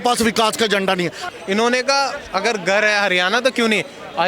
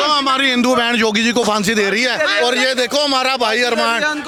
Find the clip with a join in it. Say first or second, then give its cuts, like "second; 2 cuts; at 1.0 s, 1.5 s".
first; 1 cut; at 1.2 s